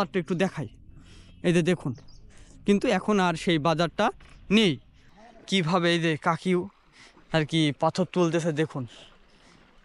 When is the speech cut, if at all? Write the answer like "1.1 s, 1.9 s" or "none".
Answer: 4.9 s

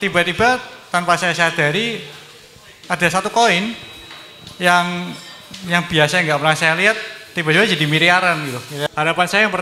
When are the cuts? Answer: 8.7 s

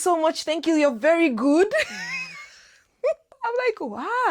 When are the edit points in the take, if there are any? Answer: 3.3 s

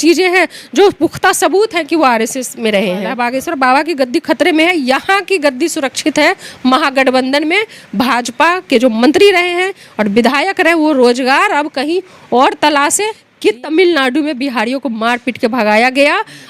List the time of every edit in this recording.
3.2 s, 13.2 s

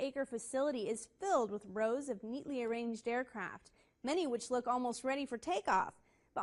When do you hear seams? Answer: none

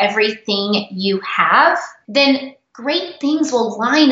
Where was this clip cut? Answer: 1.9 s

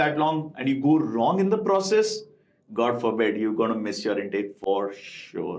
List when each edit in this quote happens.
none

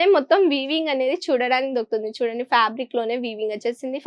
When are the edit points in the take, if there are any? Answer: none

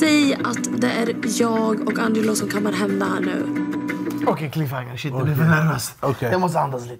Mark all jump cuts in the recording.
none

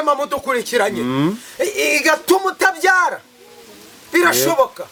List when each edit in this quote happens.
none

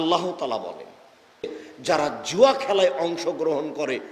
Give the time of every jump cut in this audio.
1.7 s

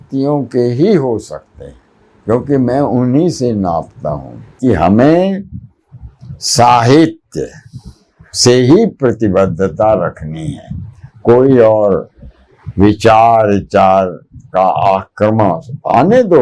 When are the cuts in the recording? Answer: 4.6 s

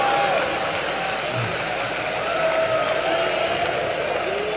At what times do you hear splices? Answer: 1.1 s

